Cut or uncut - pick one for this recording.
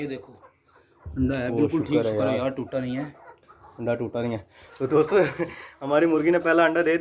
uncut